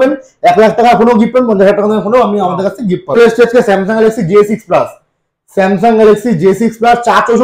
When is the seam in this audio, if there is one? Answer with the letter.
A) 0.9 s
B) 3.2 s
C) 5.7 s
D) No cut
B